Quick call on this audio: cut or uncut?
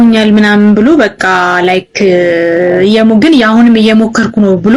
uncut